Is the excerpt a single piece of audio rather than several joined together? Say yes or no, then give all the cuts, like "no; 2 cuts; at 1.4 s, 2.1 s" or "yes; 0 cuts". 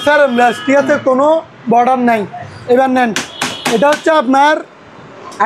no; 1 cut; at 2.5 s